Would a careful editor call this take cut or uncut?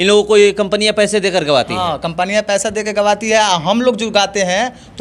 uncut